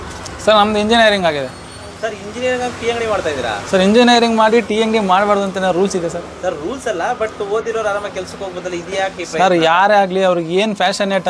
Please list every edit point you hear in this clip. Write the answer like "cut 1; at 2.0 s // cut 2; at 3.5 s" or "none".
none